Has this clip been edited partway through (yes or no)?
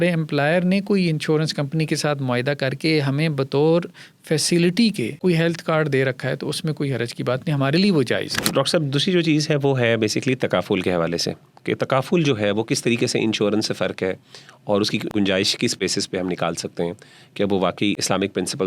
yes